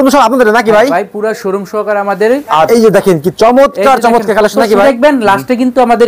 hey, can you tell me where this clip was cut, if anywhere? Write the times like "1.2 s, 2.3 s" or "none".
2.7 s, 4.8 s